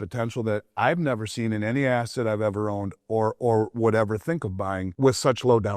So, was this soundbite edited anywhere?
yes; 1 cut; at 4.9 s

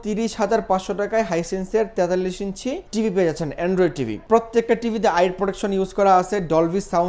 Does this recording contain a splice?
yes; 2 cuts; at 2.8 s, 4.2 s

